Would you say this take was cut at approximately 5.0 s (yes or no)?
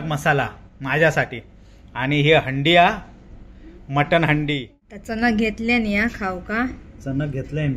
yes